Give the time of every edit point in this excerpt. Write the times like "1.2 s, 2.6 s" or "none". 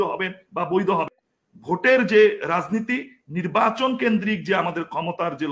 1.2 s